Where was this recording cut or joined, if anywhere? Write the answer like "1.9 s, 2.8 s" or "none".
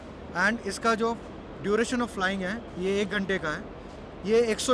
none